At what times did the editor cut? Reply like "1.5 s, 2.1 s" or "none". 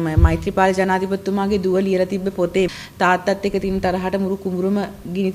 2.7 s